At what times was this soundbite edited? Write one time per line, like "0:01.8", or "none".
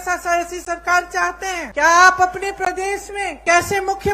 0:01.7
0:03.4